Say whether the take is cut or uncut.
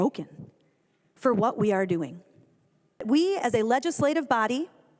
cut